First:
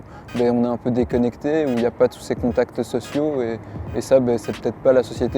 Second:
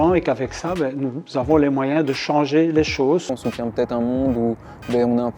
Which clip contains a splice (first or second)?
second